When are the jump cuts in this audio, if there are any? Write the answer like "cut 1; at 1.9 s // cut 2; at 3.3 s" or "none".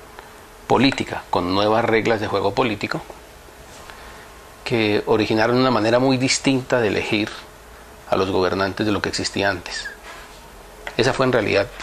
cut 1; at 6.0 s